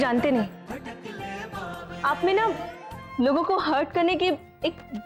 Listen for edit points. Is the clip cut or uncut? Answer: uncut